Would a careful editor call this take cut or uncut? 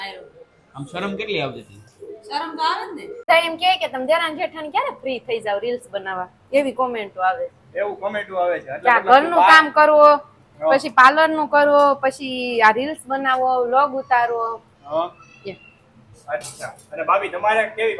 cut